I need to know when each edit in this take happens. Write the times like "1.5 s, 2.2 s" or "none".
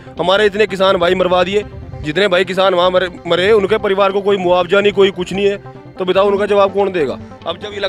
none